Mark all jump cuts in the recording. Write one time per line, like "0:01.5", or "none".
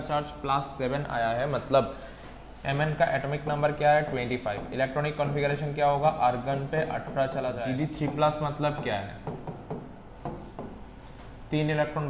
0:07.6

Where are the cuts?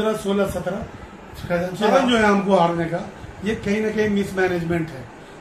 0:02.0

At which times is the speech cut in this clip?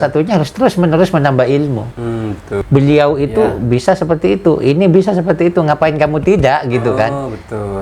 0:02.5

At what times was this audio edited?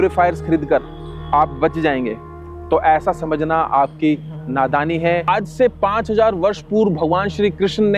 0:05.3

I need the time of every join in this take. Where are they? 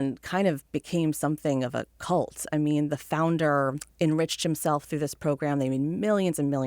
0:03.8

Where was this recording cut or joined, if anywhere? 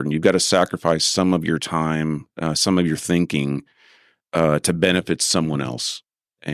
none

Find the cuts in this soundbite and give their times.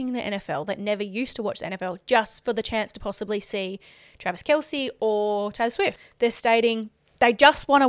0:06.0

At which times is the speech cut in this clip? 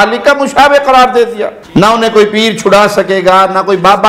0:01.5

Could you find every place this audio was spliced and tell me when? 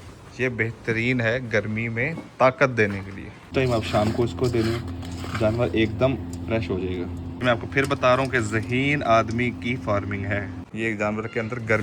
0:03.5
0:07.4
0:10.6

